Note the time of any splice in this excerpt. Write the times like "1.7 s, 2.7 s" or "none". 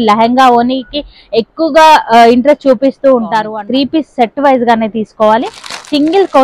3.4 s